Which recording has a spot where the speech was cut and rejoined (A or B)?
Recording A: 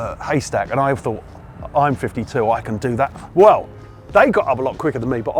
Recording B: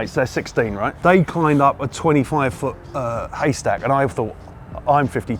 A